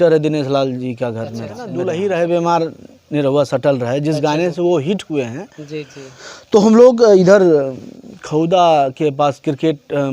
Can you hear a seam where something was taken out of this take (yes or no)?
yes